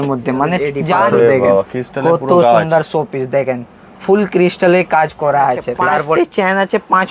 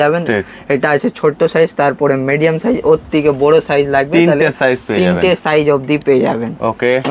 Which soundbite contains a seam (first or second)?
first